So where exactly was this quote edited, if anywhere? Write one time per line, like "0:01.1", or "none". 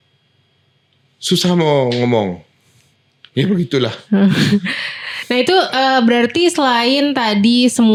none